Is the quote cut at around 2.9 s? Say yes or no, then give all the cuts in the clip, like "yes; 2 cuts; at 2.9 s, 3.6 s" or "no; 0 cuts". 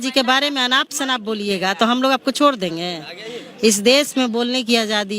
no; 0 cuts